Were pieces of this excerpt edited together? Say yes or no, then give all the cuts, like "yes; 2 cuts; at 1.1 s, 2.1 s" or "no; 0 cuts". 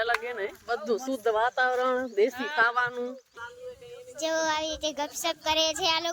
yes; 1 cut; at 3.3 s